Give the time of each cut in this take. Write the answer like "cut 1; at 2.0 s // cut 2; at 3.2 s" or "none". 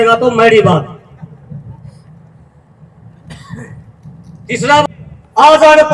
cut 1; at 4.8 s